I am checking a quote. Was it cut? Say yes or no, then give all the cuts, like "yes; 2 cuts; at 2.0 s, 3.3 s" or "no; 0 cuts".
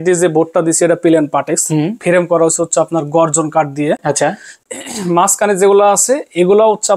no; 0 cuts